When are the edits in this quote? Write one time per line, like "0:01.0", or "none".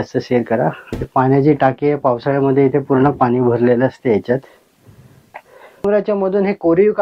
0:00.8
0:05.8